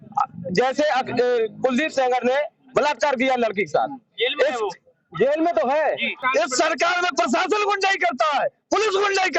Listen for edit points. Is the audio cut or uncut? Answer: cut